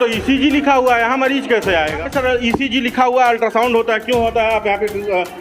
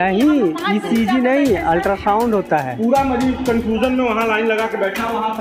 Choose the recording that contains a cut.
first; 1 cut; at 2.0 s

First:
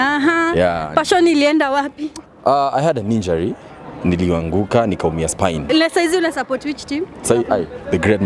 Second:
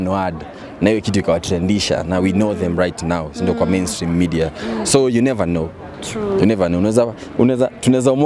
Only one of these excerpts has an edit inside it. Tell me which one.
first; 1 cut; at 5.7 s

